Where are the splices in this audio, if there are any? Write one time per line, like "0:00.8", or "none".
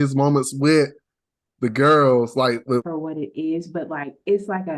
0:02.9